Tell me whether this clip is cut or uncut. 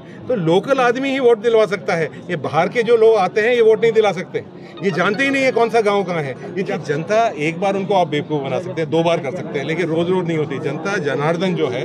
cut